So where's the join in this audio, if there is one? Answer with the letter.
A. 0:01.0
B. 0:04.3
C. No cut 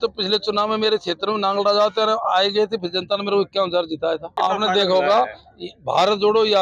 B